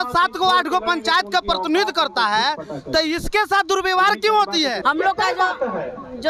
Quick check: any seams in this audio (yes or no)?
yes